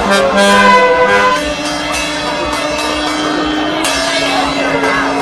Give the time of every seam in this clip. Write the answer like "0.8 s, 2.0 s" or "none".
none